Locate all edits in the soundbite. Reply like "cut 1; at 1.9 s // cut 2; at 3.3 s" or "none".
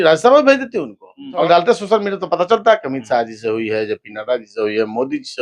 cut 1; at 1.4 s